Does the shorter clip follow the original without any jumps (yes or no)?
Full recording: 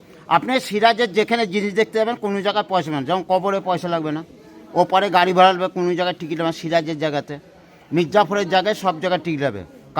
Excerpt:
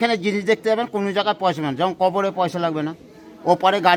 yes